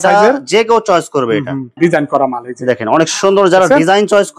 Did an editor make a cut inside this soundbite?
yes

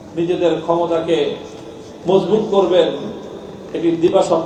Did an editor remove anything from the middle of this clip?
no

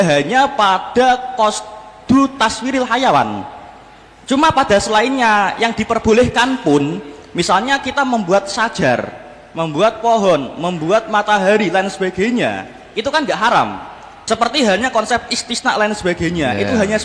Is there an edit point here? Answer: yes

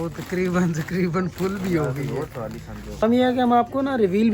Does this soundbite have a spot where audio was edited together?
no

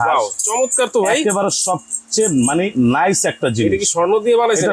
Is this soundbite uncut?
yes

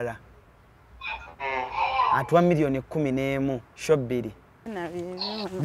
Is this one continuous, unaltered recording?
no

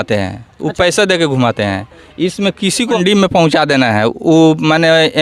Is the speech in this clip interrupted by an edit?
yes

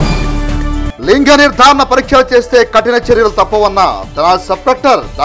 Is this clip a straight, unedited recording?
no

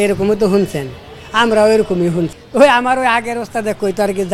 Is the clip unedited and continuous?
no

